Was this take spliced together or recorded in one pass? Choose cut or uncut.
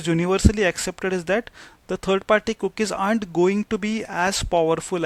uncut